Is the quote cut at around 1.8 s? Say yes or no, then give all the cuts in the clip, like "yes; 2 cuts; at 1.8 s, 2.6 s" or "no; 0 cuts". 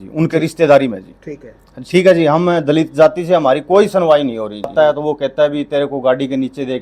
no; 1 cut; at 4.6 s